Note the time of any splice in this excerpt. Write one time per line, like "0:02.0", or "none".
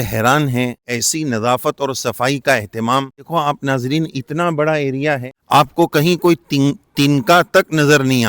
0:00.9
0:03.3
0:05.3